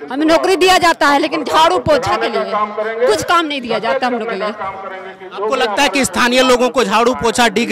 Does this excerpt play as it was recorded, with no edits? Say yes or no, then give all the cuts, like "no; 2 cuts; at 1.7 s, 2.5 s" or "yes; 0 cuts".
yes; 0 cuts